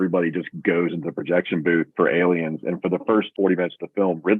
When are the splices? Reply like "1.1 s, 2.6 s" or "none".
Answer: 3.3 s